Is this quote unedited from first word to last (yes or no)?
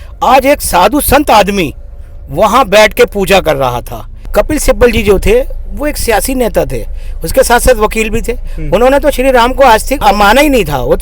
no